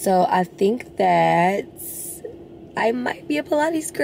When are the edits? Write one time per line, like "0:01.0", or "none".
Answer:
none